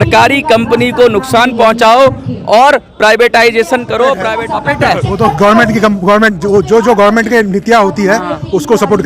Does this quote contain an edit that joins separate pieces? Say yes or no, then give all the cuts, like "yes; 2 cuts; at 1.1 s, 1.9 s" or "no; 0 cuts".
yes; 1 cut; at 4.3 s